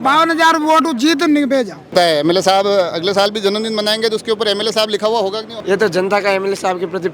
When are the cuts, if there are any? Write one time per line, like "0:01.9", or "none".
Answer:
0:01.9
0:05.5